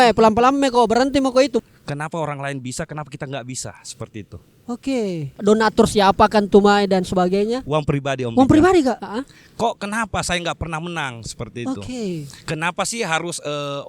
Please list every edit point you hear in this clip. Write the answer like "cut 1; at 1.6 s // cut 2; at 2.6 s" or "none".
cut 1; at 1.6 s // cut 2; at 5.2 s // cut 3; at 9.0 s